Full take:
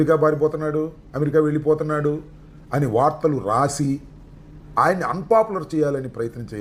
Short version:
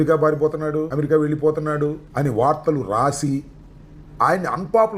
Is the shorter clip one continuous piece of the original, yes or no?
no